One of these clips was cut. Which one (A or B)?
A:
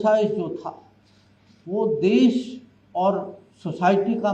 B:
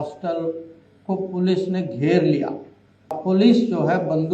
B